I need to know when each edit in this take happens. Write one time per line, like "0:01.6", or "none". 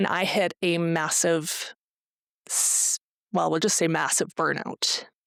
none

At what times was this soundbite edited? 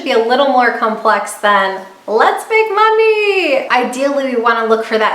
0:03.7

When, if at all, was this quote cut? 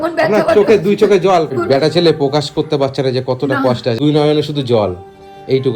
0:01.6
0:04.0

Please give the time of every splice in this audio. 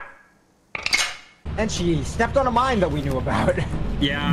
0:01.4

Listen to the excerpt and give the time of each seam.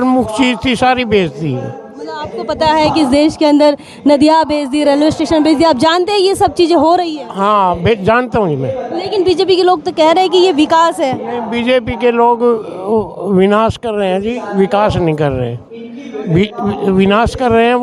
none

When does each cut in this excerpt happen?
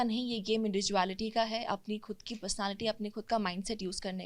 none

